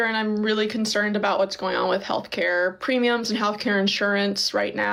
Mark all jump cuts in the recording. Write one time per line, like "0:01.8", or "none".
none